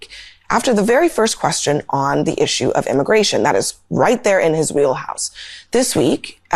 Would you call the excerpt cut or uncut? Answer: uncut